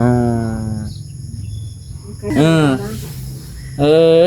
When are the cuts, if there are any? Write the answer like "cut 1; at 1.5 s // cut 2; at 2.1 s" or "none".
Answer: cut 1; at 2.3 s